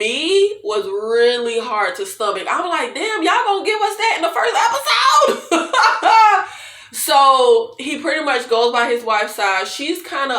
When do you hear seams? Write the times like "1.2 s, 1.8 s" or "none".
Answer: none

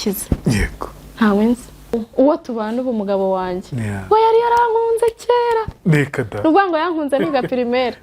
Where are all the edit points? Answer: 1.9 s

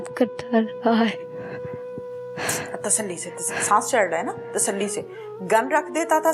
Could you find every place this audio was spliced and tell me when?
none

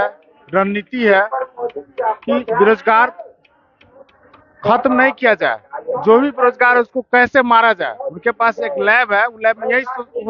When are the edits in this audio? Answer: none

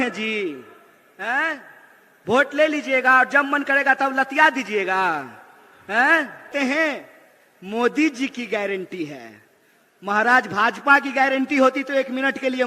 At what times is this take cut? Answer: 6.5 s

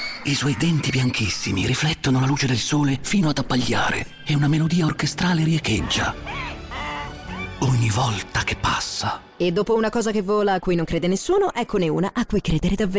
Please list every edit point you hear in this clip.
7.5 s, 9.3 s

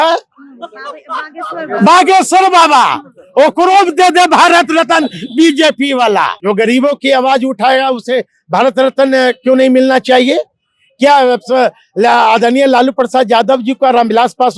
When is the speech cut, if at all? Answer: 6.4 s

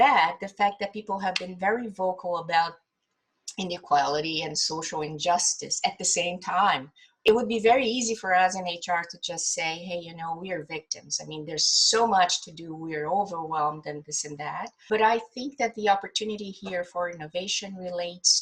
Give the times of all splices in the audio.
7.3 s, 14.8 s

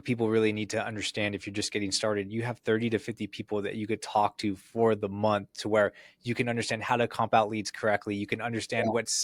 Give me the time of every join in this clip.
none

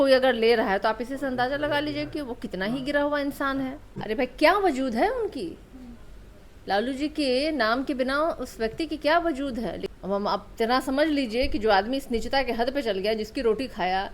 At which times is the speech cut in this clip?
3.9 s, 9.9 s

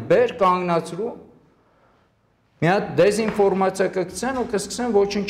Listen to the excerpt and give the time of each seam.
none

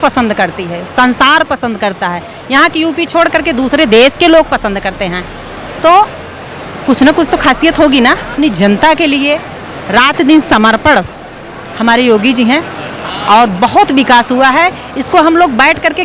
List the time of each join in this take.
8.3 s

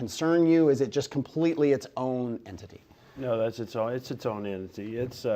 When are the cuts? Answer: 1.1 s

